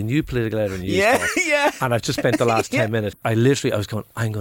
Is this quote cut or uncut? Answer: cut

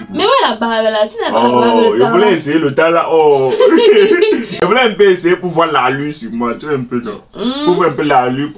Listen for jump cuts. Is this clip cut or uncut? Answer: uncut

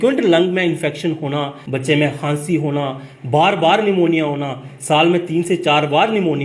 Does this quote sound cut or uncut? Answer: cut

